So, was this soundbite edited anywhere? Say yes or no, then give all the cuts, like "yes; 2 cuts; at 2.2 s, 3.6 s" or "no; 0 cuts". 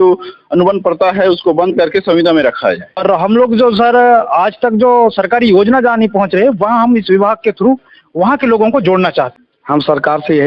yes; 2 cuts; at 3.0 s, 9.3 s